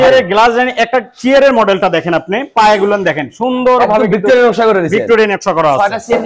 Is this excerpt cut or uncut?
uncut